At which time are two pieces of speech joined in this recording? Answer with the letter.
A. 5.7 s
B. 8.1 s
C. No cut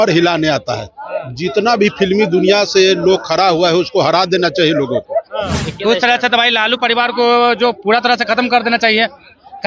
A